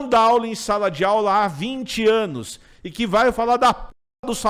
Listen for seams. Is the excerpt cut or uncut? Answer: uncut